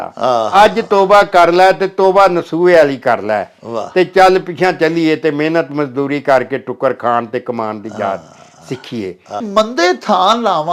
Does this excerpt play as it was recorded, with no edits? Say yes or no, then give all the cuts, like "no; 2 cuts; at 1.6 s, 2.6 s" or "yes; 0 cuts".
no; 1 cut; at 9.4 s